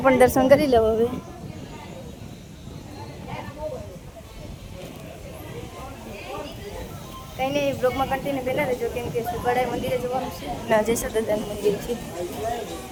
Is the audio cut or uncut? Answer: uncut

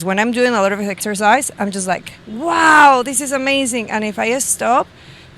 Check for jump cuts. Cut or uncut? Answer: cut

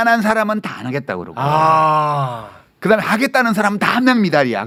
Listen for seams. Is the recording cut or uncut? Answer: uncut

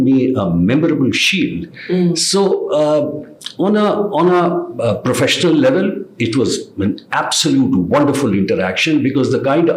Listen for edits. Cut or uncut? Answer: uncut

